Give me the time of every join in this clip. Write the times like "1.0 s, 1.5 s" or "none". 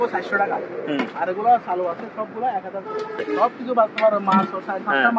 3.5 s